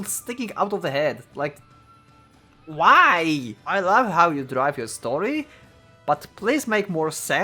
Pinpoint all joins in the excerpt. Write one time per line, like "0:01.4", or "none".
0:03.6